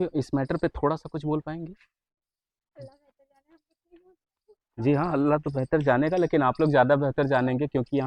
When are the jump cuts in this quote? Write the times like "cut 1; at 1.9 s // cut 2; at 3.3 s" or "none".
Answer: none